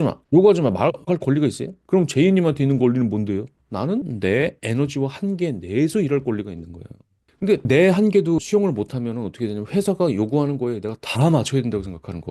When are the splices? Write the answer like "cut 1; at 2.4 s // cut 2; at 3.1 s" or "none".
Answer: cut 1; at 1.7 s // cut 2; at 4.1 s // cut 3; at 7.5 s